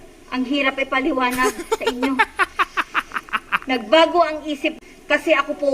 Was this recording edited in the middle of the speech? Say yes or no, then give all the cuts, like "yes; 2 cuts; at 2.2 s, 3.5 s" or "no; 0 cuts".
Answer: yes; 1 cut; at 4.7 s